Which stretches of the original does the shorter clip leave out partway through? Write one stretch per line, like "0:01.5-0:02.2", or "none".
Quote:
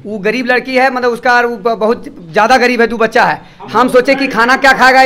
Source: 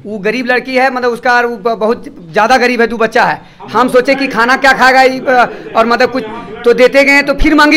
none